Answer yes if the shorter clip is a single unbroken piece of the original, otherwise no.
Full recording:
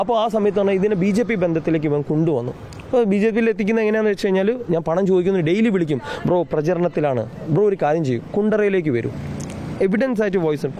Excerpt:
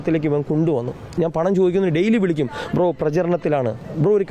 no